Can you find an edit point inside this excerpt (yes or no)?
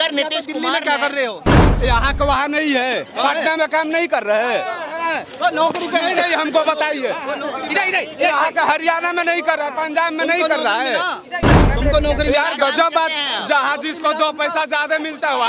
no